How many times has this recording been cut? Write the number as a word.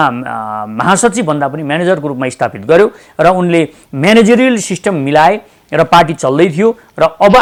zero